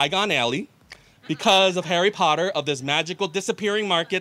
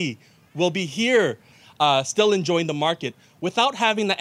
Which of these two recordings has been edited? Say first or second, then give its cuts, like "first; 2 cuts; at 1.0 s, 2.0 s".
second; 1 cut; at 1.5 s